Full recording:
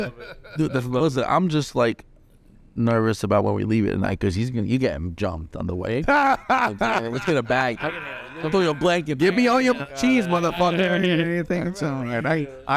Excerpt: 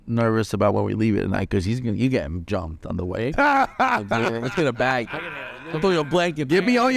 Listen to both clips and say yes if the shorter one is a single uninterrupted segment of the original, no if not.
yes